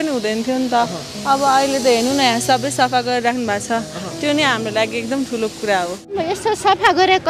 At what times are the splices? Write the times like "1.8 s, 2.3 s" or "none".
6.2 s